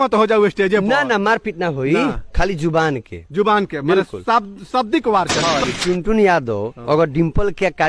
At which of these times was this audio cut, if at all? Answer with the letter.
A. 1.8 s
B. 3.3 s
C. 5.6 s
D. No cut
C